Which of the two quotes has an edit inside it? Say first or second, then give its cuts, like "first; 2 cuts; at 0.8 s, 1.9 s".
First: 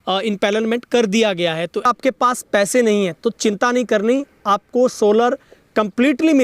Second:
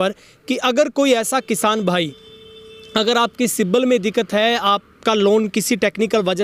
first; 1 cut; at 1.9 s